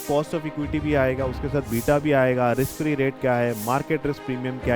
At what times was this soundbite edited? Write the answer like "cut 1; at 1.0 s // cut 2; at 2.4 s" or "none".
none